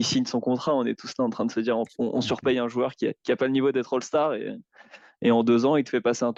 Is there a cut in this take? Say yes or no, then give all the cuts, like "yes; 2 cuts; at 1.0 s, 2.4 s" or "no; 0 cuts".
no; 0 cuts